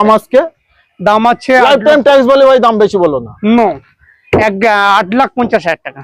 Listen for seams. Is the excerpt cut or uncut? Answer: uncut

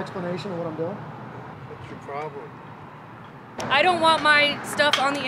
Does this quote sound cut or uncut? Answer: cut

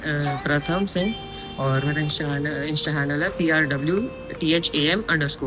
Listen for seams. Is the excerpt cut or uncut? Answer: uncut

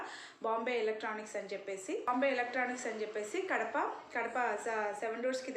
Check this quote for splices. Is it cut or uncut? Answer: cut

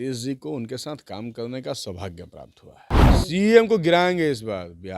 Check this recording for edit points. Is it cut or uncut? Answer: cut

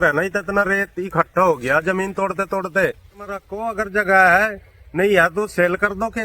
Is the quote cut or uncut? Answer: cut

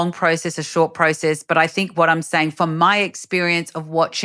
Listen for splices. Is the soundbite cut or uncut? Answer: uncut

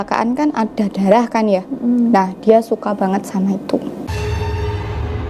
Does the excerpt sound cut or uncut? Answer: uncut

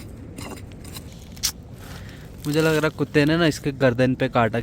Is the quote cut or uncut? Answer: cut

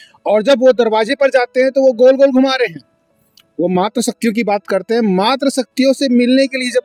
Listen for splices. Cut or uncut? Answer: uncut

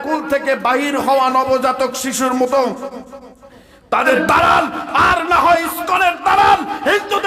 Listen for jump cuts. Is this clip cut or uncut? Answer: cut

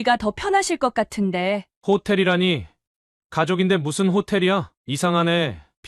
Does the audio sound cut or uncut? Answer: cut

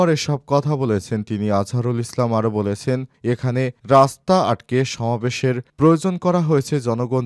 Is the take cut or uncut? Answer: uncut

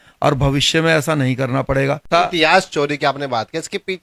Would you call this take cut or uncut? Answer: uncut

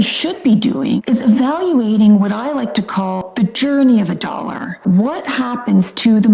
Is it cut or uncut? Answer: cut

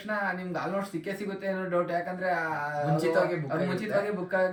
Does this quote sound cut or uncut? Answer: uncut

